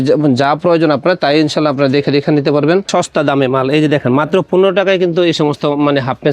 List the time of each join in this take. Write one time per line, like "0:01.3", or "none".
0:02.9